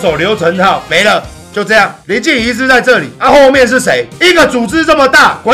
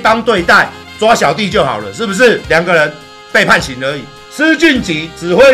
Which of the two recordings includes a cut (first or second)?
second